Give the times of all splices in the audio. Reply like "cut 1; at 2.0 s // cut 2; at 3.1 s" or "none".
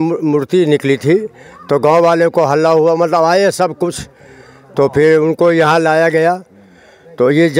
none